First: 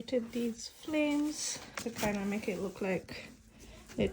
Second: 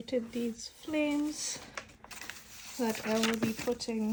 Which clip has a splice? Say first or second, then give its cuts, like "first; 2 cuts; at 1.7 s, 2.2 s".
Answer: first; 1 cut; at 1.7 s